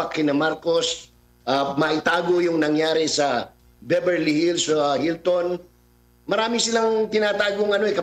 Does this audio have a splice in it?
no; 0 cuts

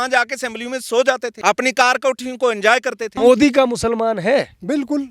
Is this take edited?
yes; 2 cuts; at 1.3 s, 3.2 s

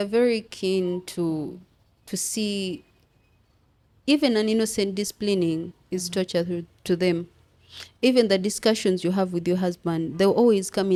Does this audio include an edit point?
no; 0 cuts

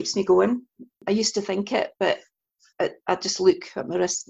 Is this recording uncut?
no; 1 cut; at 1.0 s

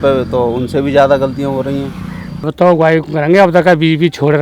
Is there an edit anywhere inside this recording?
yes; 1 cut; at 2.4 s

